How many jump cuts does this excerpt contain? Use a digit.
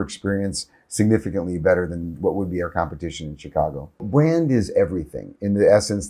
1